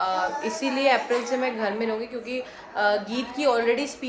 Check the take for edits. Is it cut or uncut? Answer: uncut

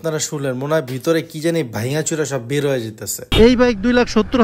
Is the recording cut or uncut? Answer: cut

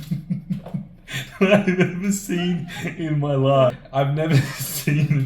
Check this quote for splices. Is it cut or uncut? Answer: cut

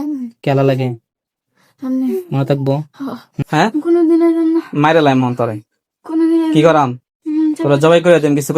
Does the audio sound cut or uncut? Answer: cut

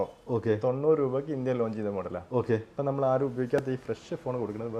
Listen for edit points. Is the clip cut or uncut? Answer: uncut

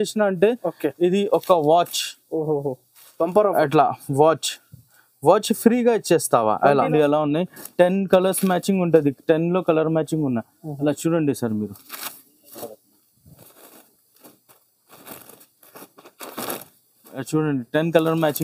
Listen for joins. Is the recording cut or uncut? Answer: cut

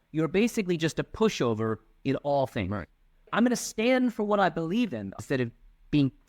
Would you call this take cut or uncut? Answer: cut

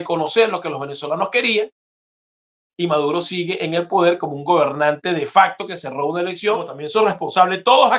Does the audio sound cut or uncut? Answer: cut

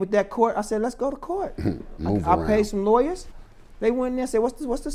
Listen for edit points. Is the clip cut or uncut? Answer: uncut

